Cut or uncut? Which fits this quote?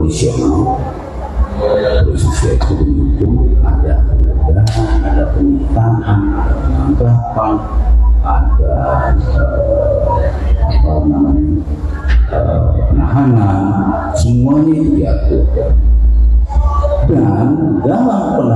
uncut